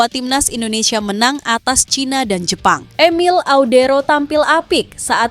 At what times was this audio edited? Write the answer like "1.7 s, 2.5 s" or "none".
2.9 s